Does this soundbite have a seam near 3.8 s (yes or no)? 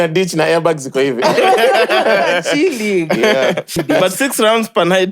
yes